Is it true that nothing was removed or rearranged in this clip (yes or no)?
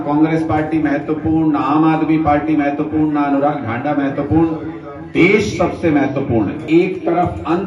no